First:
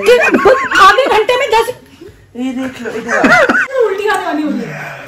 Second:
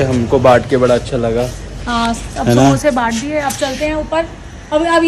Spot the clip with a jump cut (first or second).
first